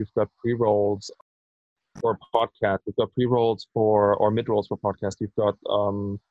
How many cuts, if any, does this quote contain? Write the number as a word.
zero